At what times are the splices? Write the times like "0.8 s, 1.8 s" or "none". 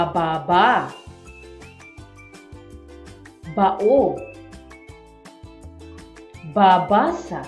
none